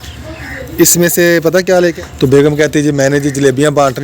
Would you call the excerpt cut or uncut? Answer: cut